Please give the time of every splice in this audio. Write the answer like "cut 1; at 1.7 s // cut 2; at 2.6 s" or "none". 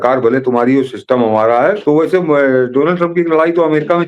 cut 1; at 1.8 s